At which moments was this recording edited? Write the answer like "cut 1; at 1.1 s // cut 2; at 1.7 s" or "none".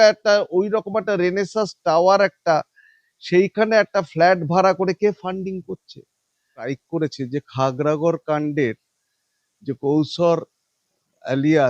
cut 1; at 6.7 s

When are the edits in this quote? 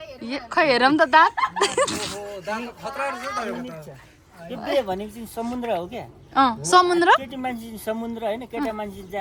none

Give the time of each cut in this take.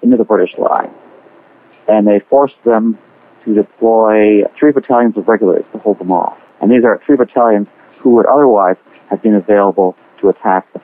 none

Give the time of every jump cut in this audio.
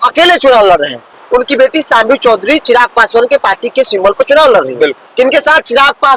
cut 1; at 1.1 s // cut 2; at 5.0 s

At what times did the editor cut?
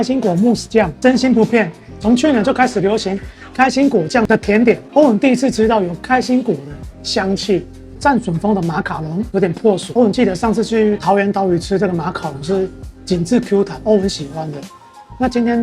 cut 1; at 0.9 s // cut 2; at 8.0 s // cut 3; at 9.9 s

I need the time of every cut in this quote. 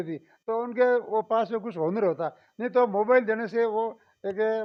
none

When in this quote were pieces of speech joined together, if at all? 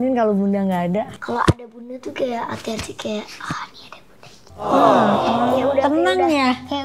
cut 1; at 1.1 s

